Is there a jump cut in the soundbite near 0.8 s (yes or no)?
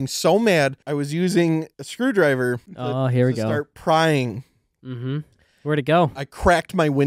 yes